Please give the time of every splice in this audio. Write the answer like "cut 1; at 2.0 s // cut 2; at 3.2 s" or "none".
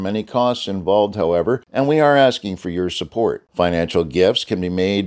cut 1; at 1.7 s // cut 2; at 3.4 s